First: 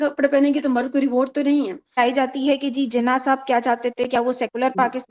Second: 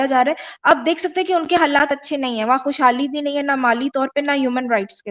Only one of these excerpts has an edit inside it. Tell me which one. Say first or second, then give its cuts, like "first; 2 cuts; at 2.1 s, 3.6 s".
first; 1 cut; at 1.9 s